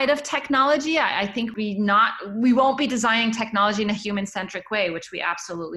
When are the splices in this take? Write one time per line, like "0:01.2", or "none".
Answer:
0:01.5